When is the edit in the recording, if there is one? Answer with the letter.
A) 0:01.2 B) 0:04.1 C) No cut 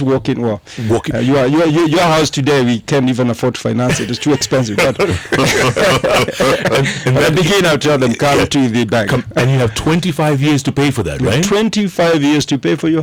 C